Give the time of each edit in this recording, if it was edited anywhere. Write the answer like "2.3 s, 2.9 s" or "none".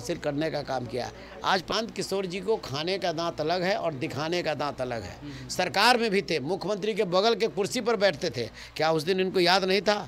1.7 s